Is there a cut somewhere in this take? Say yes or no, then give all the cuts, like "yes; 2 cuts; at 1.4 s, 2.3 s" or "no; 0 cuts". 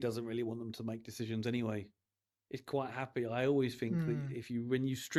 no; 0 cuts